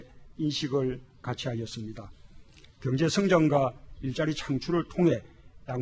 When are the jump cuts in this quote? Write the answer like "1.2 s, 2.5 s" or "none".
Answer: 3.3 s